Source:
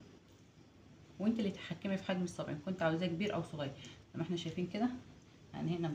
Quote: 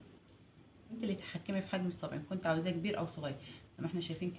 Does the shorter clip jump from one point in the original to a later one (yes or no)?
yes